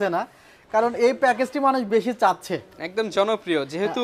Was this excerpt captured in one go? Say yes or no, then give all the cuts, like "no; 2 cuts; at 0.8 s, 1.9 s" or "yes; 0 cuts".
yes; 0 cuts